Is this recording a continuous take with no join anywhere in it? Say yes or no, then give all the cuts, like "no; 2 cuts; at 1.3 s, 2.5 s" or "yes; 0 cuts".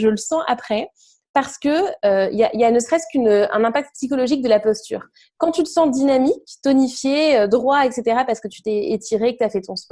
yes; 0 cuts